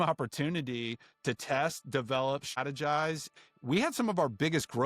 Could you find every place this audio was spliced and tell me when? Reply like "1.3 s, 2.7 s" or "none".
2.6 s, 3.3 s

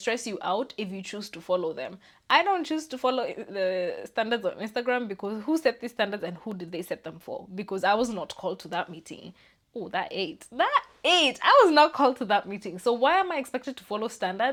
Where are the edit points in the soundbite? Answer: none

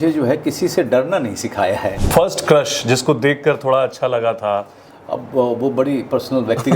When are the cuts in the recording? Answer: 2.0 s

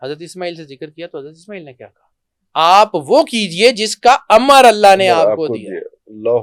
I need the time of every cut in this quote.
none

